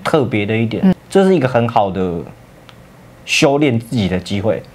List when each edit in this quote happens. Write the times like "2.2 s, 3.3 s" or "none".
0.9 s